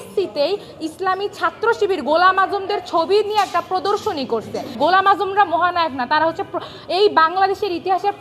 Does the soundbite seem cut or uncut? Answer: cut